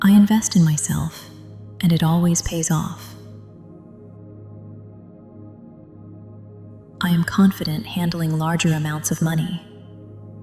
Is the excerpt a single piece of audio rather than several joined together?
no; 4 cuts; at 3.0 s, 5.2 s, 7.0 s, 9.6 s

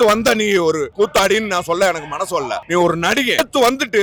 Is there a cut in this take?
no; 0 cuts

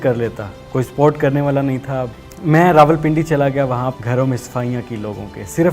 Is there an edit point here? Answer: yes; 2 cuts; at 2.1 s, 3.9 s

